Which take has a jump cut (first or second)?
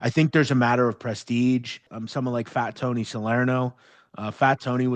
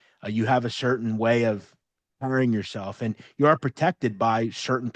first